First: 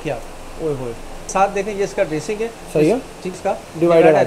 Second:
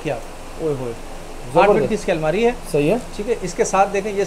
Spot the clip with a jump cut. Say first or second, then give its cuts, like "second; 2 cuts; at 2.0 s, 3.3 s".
first; 2 cuts; at 1.3 s, 3.4 s